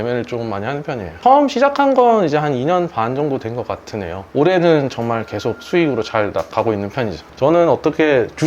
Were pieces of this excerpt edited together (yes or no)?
yes